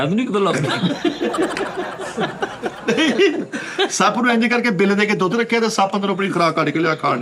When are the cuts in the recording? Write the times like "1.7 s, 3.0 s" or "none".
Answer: none